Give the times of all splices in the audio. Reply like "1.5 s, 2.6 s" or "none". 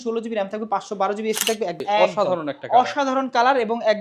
1.8 s

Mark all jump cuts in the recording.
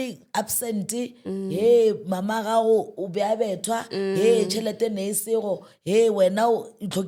none

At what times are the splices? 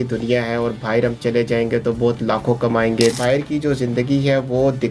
3.1 s

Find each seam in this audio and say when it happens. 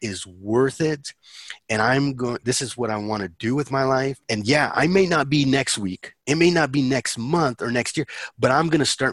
4.2 s

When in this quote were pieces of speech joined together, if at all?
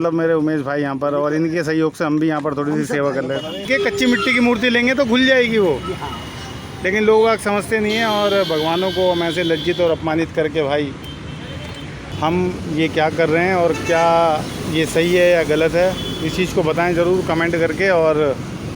3.7 s, 12.0 s

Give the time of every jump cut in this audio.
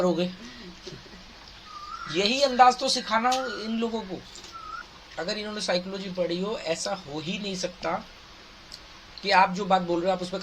4.8 s

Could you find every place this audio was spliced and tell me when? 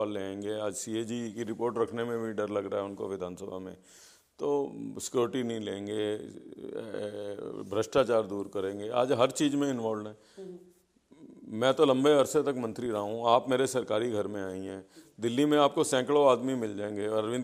none

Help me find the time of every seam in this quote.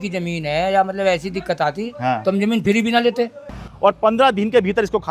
3.6 s

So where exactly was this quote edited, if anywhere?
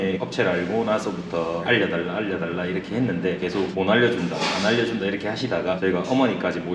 1.6 s

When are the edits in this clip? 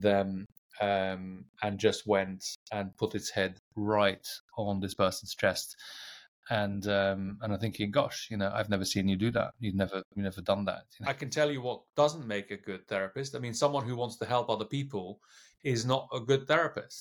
10.9 s

